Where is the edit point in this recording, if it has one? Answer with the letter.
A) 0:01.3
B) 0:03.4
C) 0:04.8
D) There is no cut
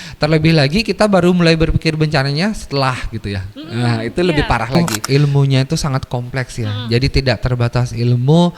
C